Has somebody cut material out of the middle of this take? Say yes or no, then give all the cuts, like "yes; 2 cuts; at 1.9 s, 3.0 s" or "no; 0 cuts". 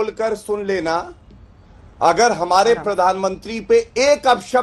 no; 0 cuts